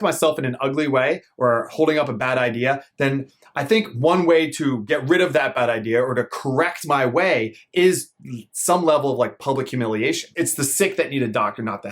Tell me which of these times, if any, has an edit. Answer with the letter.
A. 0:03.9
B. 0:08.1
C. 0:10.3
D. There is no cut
C